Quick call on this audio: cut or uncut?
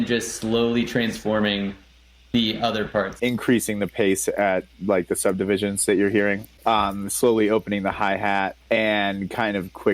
cut